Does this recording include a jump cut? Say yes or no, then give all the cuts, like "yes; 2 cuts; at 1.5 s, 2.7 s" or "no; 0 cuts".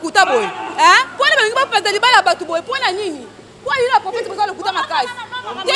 no; 0 cuts